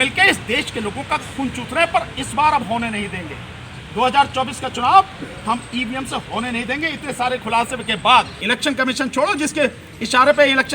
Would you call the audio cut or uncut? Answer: cut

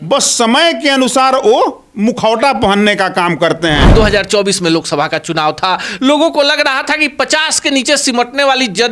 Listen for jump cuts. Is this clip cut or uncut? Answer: cut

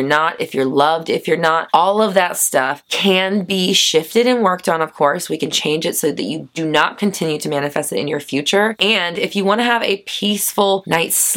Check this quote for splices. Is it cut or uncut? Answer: cut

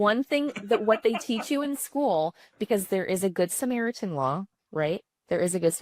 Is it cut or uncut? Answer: uncut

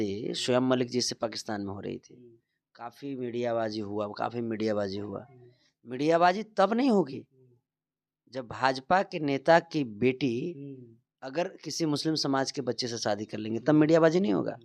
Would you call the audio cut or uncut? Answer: uncut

